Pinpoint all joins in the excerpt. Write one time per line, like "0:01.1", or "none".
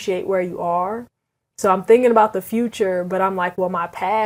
none